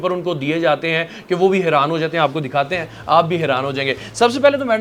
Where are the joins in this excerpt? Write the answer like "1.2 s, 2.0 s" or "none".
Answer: none